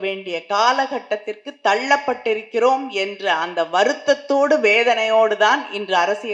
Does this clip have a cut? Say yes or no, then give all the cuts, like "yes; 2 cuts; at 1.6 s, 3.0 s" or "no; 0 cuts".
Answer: no; 0 cuts